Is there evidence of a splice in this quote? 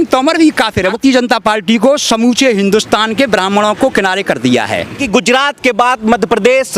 yes; 2 cuts; at 0.9 s, 5.0 s

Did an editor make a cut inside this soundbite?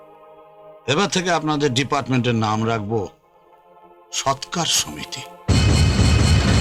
no; 0 cuts

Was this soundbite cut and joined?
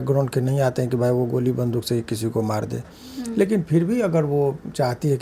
no; 0 cuts

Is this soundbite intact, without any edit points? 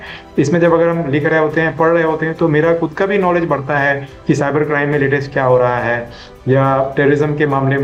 yes; 0 cuts

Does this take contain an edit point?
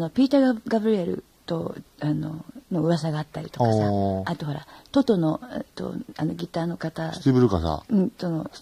no; 0 cuts

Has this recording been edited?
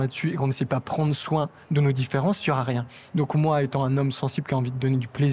no; 0 cuts

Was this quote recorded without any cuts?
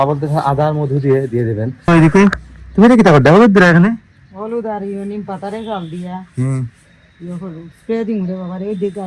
no; 1 cut; at 1.9 s

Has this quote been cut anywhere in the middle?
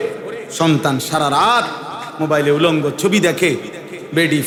no; 0 cuts

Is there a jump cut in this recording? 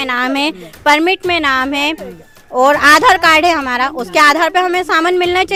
no; 0 cuts

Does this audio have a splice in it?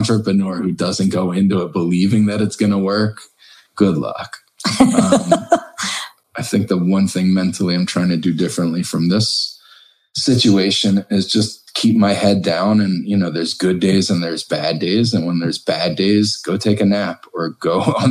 yes; 1 cut; at 6.2 s

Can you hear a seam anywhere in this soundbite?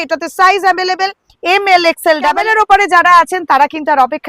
yes; 1 cut; at 2.3 s

